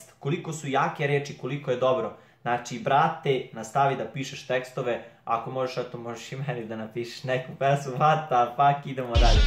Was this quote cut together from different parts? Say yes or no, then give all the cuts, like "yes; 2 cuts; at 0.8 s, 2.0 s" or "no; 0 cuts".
no; 0 cuts